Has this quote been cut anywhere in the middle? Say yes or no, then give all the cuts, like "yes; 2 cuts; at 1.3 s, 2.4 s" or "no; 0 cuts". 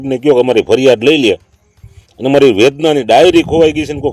no; 0 cuts